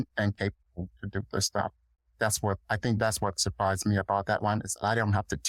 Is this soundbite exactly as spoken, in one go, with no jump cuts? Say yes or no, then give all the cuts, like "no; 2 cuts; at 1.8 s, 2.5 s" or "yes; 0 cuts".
yes; 0 cuts